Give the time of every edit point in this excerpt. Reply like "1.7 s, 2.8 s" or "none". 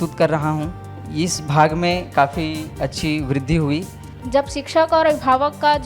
1.0 s, 4.1 s